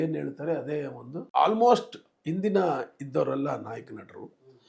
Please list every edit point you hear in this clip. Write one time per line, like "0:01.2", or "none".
0:01.3